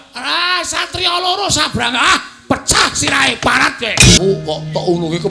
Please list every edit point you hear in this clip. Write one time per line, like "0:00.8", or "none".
0:04.2